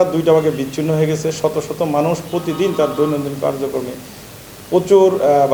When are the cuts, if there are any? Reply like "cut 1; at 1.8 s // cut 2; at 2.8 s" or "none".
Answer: none